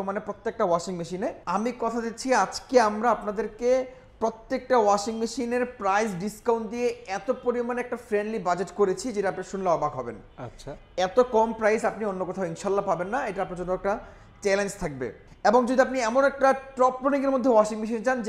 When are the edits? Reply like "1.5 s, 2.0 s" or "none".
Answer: 1.4 s, 15.2 s